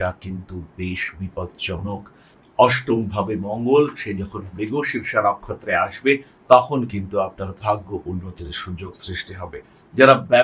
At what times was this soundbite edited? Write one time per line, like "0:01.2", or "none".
0:02.3